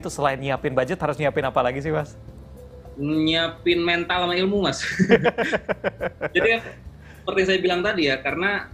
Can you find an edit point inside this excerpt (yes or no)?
no